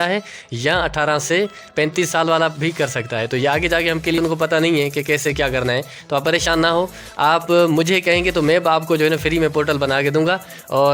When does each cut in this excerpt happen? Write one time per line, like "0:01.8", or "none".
0:04.2